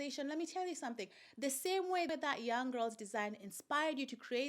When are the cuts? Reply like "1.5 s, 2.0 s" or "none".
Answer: 2.1 s